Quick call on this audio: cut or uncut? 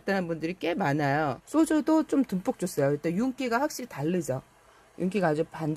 cut